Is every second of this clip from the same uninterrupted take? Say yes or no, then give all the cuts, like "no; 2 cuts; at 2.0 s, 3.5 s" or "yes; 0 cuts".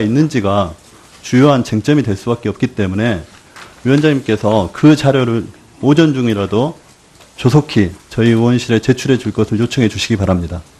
yes; 0 cuts